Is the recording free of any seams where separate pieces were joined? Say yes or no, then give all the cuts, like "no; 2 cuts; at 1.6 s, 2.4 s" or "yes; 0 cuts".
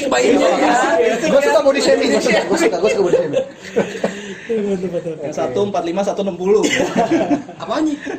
yes; 0 cuts